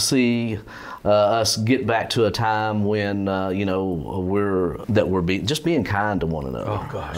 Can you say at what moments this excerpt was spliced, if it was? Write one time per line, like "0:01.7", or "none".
0:04.8

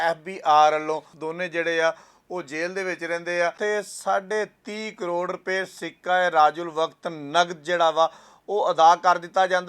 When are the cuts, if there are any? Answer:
0:01.2
0:03.6

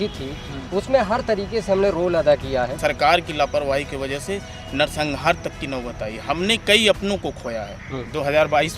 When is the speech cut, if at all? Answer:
0:02.7
0:07.7

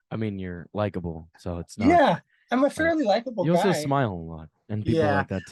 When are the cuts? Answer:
none

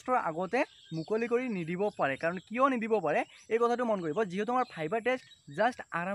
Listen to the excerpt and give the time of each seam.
none

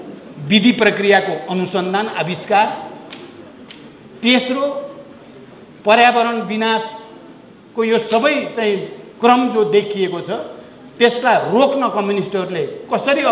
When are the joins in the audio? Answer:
none

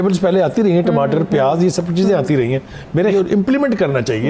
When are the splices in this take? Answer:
0:03.1

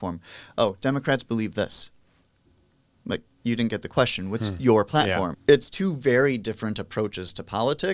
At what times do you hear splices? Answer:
0:05.3

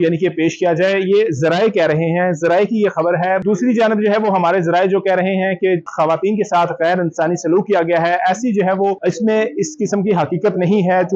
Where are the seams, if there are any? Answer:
0:03.4
0:05.9
0:09.0

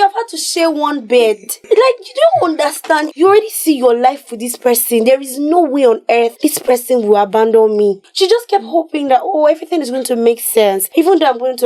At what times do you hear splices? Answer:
0:01.5
0:03.1
0:06.3
0:08.1
0:10.8

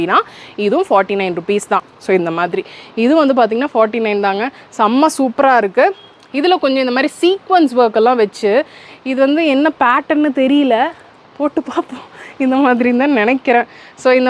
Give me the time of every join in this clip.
0:01.9

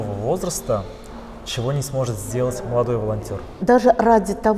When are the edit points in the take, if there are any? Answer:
0:03.5

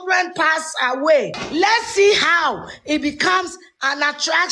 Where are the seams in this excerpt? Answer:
0:01.4

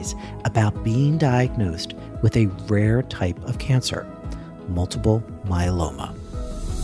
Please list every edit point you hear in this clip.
none

